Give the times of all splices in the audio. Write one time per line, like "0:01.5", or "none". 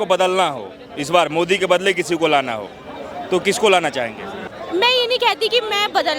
none